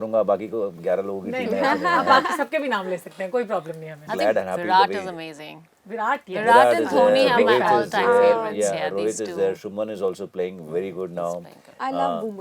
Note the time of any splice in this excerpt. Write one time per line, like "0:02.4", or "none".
0:04.1